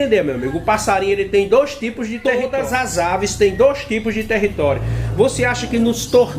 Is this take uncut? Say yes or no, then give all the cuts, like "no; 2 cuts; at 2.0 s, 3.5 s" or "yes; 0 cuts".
no; 1 cut; at 2.1 s